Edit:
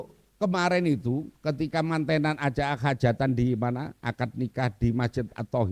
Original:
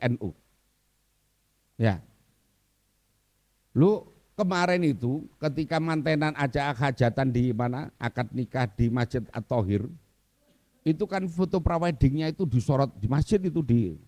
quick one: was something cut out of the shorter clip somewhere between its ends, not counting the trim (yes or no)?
no